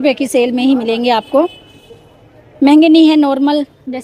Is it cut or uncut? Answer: uncut